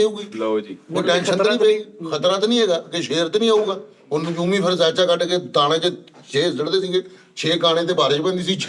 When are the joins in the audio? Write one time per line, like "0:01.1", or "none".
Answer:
none